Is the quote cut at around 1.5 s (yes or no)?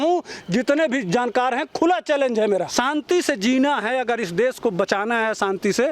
no